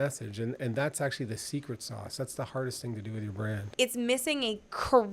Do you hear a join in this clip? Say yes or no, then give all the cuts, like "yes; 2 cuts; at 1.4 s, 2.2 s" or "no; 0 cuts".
yes; 1 cut; at 3.7 s